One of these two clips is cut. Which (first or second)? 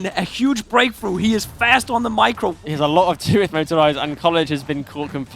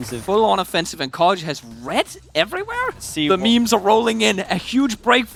first